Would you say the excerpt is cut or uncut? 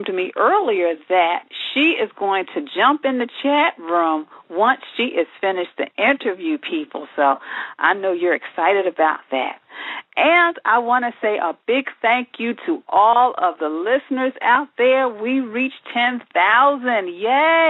uncut